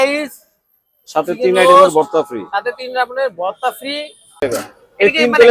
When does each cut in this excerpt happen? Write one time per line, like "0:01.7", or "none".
0:04.3